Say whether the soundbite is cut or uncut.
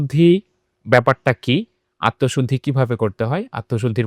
uncut